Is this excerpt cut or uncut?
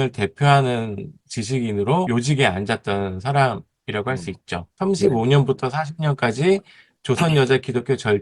cut